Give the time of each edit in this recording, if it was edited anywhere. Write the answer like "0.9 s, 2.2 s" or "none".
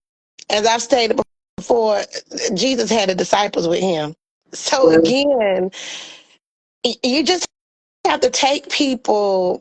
4.5 s